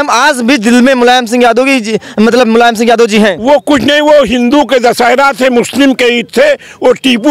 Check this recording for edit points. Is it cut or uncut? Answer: uncut